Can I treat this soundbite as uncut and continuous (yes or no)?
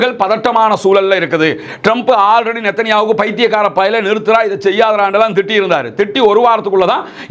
yes